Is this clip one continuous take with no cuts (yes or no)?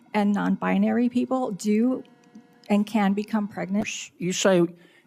no